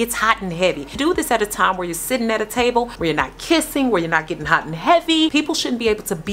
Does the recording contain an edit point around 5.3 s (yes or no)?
yes